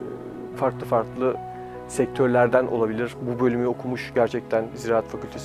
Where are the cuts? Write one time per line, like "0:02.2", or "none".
none